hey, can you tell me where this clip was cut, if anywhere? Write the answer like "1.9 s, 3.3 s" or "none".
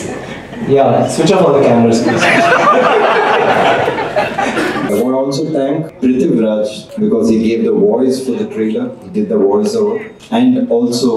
4.9 s, 5.9 s, 6.8 s, 10.1 s